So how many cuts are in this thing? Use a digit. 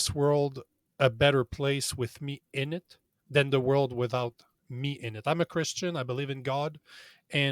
1